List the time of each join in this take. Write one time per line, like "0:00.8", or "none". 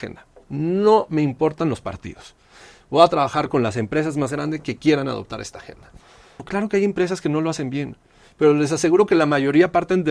0:06.4